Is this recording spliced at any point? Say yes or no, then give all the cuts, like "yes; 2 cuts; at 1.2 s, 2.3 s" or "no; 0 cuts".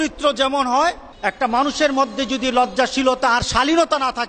yes; 1 cut; at 1.1 s